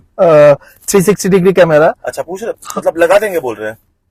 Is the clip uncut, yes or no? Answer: yes